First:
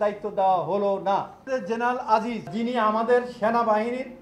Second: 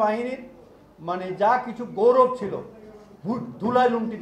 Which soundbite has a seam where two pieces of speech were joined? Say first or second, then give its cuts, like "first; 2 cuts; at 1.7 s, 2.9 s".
first; 2 cuts; at 1.4 s, 2.5 s